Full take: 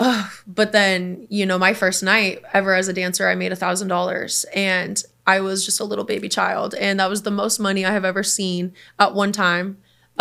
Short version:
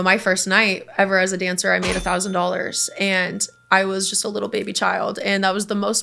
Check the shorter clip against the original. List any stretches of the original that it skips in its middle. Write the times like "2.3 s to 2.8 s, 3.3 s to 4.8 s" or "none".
none